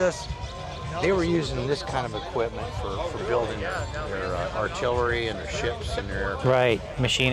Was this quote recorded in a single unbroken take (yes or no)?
yes